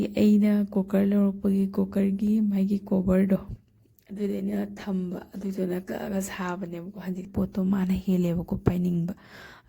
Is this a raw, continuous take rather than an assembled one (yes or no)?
no